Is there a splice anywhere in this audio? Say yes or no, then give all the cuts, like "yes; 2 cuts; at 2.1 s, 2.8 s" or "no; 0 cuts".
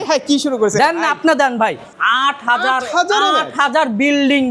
yes; 1 cut; at 1.9 s